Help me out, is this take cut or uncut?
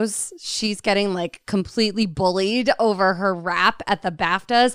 uncut